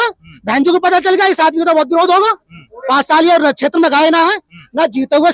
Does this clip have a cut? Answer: no; 0 cuts

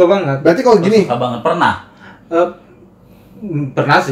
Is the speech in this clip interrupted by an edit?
no; 0 cuts

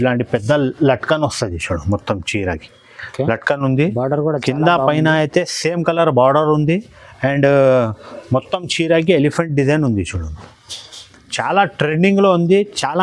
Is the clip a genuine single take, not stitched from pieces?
yes; 0 cuts

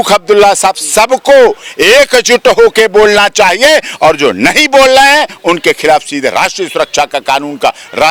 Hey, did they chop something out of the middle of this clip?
no; 0 cuts

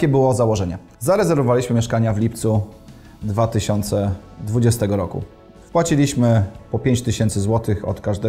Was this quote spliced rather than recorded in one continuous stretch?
no; 0 cuts

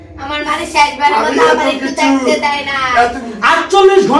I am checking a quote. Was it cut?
yes; 1 cut; at 3.3 s

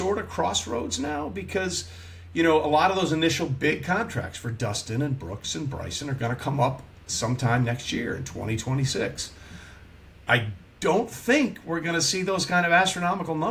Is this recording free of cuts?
yes; 0 cuts

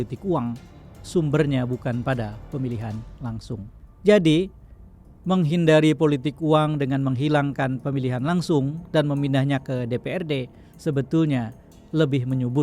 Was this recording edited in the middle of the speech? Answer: yes; 1 cut; at 3.8 s

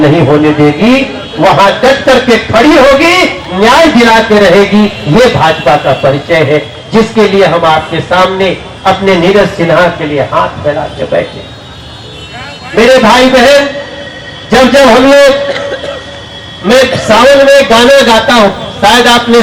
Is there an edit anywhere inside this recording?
no; 0 cuts

